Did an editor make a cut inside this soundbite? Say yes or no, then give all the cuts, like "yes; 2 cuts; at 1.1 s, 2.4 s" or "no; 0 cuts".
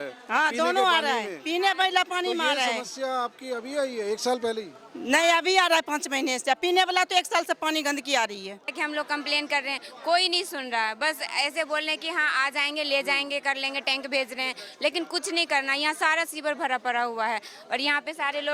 yes; 1 cut; at 8.8 s